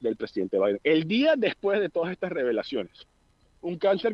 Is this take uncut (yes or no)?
yes